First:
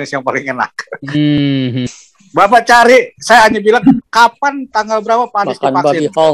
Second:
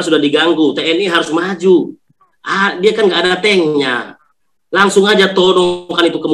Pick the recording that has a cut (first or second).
first